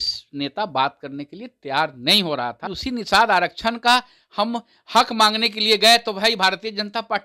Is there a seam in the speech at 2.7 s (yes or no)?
yes